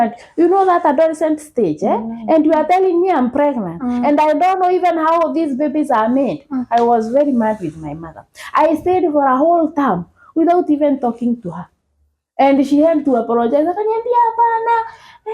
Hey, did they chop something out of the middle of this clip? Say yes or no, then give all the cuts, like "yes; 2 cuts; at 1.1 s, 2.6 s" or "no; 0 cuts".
no; 0 cuts